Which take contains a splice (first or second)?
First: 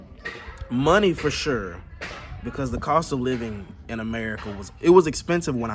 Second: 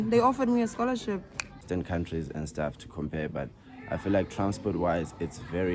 second